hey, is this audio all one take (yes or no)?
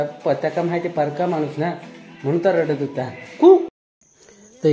no